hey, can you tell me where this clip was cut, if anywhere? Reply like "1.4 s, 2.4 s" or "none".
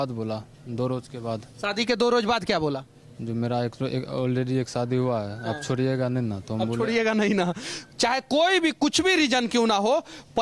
7.7 s